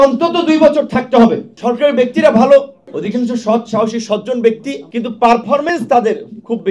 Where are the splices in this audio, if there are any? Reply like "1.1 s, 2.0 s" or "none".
1.5 s